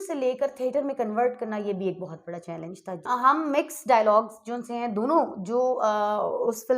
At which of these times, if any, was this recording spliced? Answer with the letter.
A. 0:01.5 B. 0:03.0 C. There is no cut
B